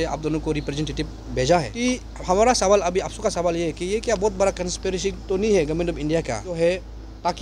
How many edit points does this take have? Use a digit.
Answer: 2